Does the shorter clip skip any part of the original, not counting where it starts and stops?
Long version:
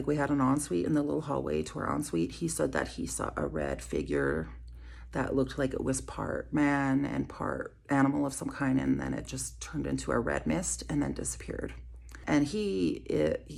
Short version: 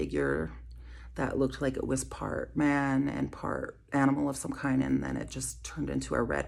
no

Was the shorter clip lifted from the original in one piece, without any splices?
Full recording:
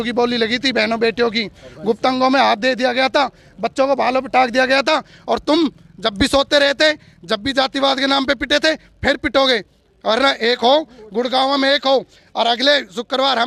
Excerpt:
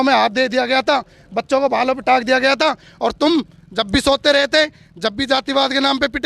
yes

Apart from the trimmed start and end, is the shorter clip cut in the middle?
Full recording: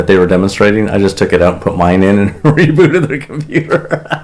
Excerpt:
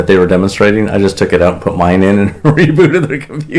no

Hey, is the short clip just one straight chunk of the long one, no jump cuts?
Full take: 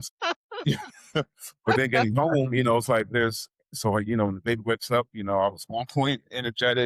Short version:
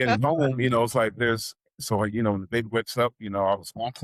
yes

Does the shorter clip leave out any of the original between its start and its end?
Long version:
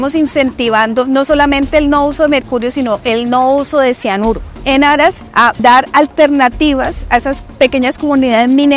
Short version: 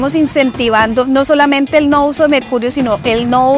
no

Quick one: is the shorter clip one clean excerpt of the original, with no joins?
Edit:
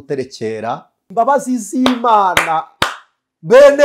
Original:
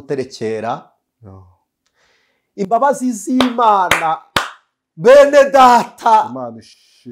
no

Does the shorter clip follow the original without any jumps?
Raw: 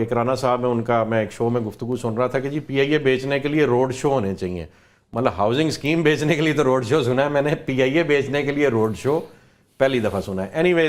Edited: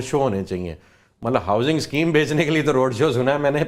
yes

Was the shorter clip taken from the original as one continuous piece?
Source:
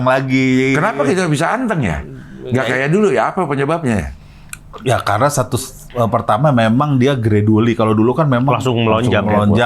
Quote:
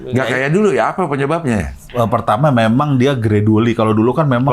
no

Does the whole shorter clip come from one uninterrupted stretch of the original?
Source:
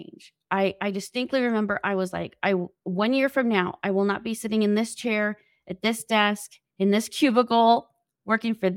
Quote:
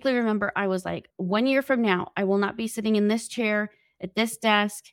no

